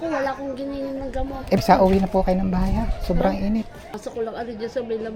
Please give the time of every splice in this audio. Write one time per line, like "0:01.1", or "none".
0:01.6
0:04.0